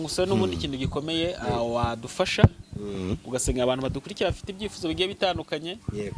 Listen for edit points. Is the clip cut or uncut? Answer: uncut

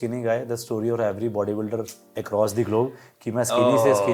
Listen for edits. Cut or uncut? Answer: uncut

